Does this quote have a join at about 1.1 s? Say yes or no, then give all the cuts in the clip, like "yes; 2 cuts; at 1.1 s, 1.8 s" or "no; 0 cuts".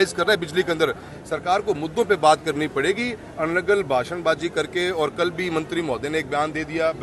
yes; 1 cut; at 1.1 s